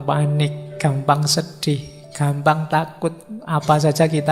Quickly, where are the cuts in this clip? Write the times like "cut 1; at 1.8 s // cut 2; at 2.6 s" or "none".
none